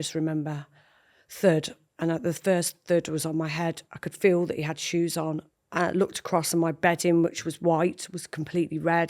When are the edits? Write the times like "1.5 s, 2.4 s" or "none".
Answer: 5.4 s